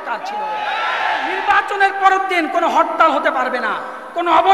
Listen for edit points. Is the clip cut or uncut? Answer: cut